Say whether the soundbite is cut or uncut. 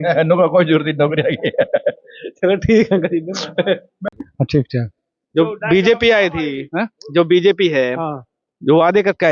uncut